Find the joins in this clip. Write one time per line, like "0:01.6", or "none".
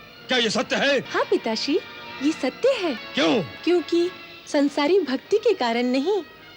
0:01.1
0:03.0